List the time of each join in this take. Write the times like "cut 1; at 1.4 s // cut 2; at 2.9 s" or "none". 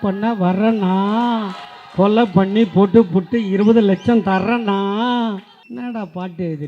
cut 1; at 5.6 s